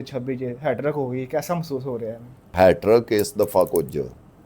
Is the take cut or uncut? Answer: cut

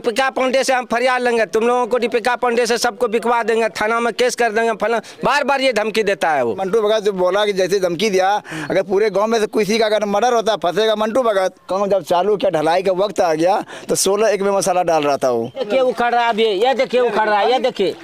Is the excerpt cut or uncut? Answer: cut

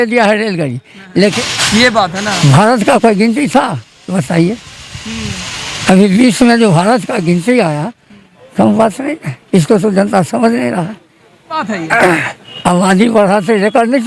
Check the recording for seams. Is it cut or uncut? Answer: cut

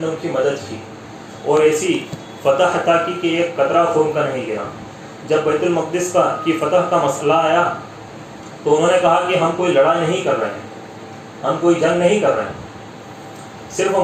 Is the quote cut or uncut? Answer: uncut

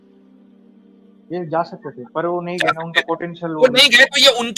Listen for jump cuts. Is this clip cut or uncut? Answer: cut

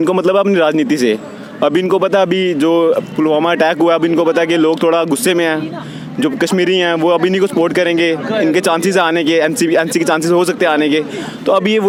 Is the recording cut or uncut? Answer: uncut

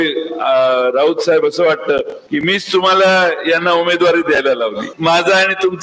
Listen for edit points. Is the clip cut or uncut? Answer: cut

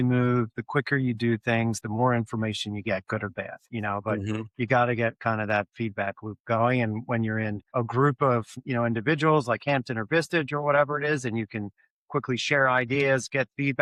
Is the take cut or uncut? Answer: uncut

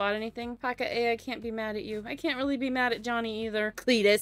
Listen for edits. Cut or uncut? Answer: uncut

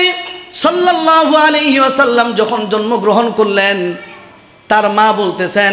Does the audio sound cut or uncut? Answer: uncut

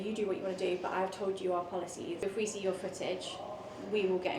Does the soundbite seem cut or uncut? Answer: cut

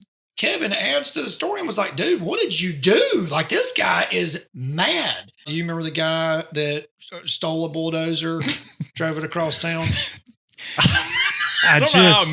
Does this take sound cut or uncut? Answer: cut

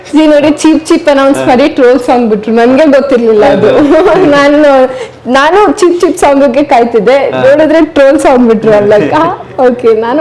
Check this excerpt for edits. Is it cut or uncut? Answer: uncut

